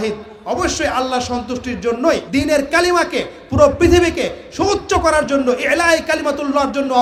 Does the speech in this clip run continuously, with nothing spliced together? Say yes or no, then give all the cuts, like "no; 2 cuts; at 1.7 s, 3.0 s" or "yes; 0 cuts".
yes; 0 cuts